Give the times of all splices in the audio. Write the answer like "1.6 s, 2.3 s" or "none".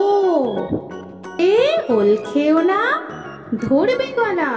1.4 s